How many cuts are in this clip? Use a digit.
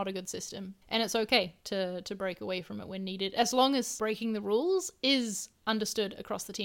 1